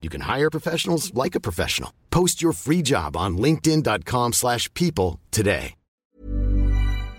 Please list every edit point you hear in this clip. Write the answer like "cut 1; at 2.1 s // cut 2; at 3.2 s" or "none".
cut 1; at 5.8 s